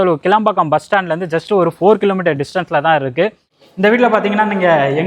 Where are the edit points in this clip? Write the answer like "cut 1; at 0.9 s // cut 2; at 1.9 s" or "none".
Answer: cut 1; at 3.5 s